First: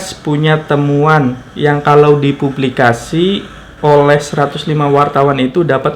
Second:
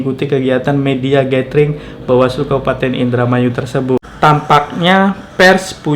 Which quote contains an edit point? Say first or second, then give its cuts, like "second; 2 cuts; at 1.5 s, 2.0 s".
second; 1 cut; at 4.0 s